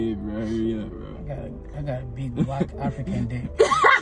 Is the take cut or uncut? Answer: uncut